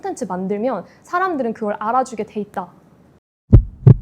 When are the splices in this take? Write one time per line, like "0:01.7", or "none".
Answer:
0:03.1